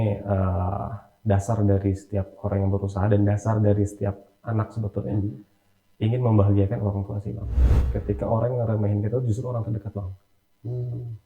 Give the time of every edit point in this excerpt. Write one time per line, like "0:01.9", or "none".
0:07.7

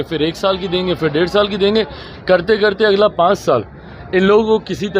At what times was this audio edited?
none

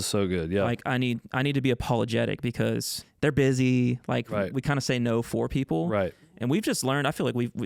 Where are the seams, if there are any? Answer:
0:02.9

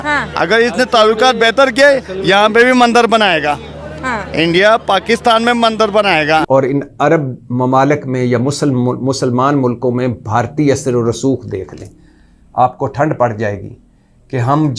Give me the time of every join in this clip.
0:06.4

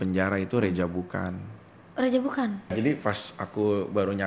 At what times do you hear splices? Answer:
0:02.8

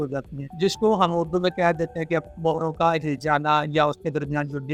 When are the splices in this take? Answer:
none

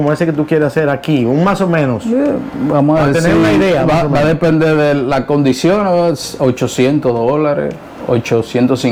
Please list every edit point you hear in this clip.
none

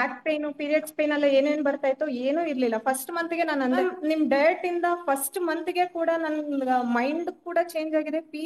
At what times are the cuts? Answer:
0:03.8

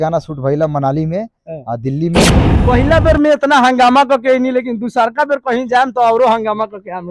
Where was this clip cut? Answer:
0:02.5

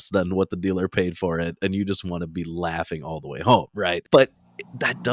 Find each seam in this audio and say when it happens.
0:04.0

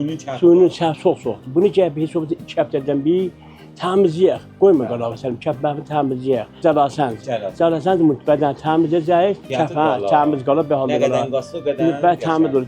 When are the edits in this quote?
0:06.6
0:09.5

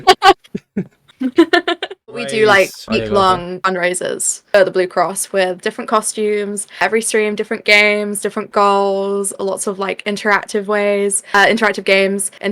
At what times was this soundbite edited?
0:02.3

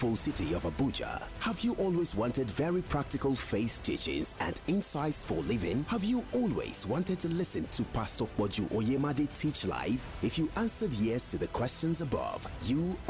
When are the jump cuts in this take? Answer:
none

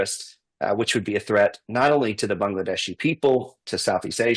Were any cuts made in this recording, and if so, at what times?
none

